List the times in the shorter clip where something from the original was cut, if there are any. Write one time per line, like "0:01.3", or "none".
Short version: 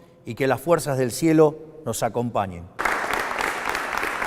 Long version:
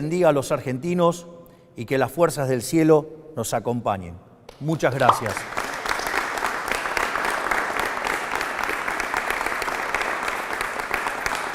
0:02.8